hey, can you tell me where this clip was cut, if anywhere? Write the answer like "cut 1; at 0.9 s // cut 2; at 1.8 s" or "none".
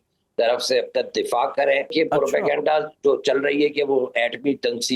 cut 1; at 1.9 s